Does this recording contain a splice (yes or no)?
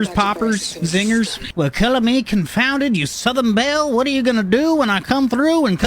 yes